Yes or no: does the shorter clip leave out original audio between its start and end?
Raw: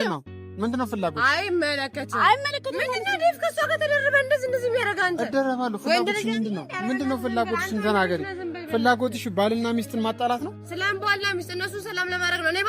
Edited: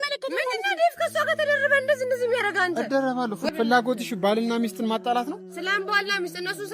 yes